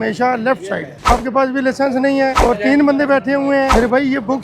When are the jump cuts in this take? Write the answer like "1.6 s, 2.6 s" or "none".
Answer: 1.1 s, 2.4 s, 3.7 s